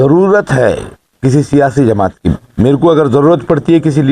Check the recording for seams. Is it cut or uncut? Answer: cut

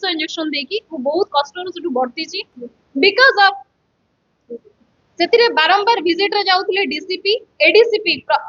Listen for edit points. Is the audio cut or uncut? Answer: uncut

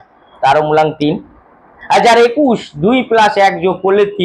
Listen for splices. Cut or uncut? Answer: uncut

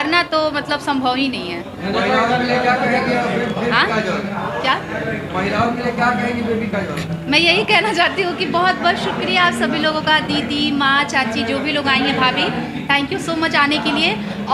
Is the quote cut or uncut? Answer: uncut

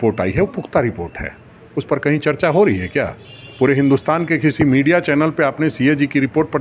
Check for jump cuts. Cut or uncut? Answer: uncut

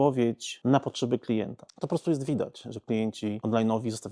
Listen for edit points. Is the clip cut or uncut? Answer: cut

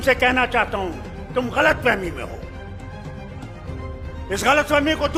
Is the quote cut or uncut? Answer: uncut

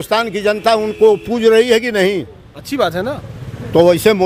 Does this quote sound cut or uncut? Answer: uncut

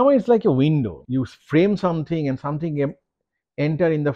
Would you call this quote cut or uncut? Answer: cut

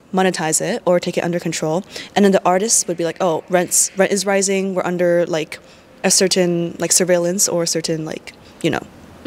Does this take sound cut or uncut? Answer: uncut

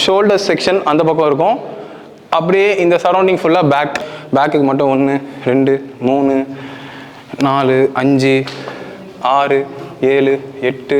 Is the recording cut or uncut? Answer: uncut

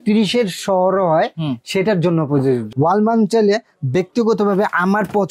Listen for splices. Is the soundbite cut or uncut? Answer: cut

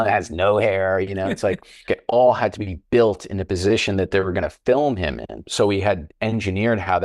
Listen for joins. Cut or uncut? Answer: cut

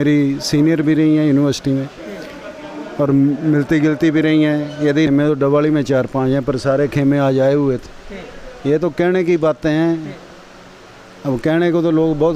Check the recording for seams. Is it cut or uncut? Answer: cut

